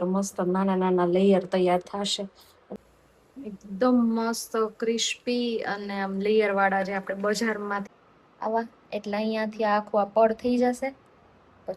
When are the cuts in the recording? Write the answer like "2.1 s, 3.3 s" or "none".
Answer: 2.6 s, 7.9 s